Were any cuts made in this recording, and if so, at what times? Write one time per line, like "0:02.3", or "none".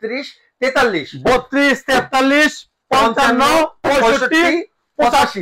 none